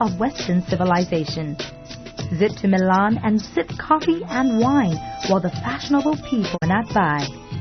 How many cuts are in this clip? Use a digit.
1